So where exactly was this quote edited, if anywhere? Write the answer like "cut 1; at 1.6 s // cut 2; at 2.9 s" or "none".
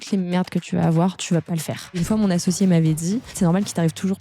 cut 1; at 2.0 s // cut 2; at 3.4 s